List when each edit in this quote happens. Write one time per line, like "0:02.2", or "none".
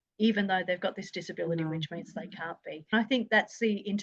0:02.9